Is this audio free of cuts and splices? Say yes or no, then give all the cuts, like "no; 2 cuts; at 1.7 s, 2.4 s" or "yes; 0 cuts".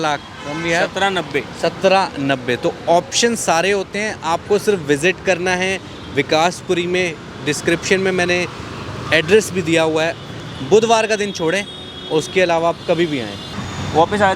yes; 0 cuts